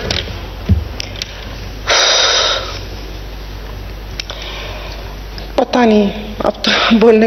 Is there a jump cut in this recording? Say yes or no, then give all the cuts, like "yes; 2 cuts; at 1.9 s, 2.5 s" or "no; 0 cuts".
no; 0 cuts